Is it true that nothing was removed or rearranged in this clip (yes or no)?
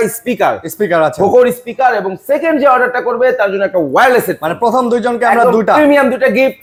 yes